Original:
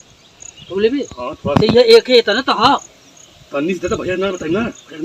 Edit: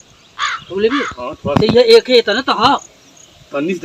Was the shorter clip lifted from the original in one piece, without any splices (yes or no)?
yes